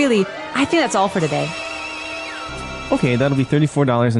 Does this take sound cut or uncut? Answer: cut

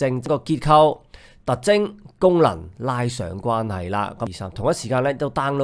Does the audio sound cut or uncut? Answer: cut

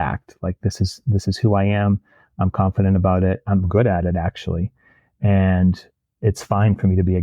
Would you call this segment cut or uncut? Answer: cut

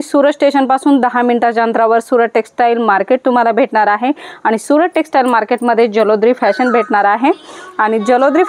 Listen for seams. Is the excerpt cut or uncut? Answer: uncut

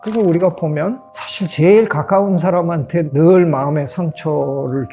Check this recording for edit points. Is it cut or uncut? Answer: uncut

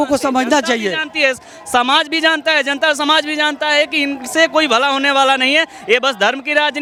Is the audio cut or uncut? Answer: uncut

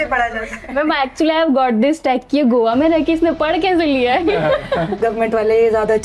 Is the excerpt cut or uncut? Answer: cut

